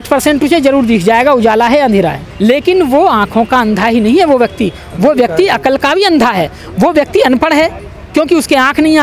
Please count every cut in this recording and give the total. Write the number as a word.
one